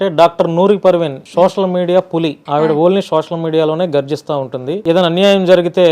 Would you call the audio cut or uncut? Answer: cut